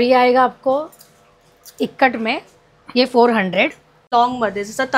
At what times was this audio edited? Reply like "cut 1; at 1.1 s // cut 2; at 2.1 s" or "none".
cut 1; at 3.9 s